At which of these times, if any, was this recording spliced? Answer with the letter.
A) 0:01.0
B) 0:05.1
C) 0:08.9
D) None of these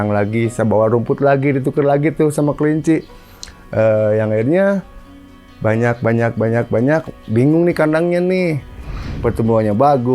C